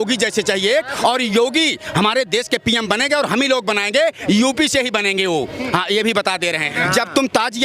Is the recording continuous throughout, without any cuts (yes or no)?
no